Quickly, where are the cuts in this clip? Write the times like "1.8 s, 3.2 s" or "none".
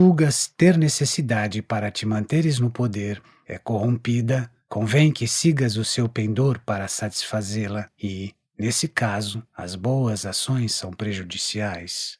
7.1 s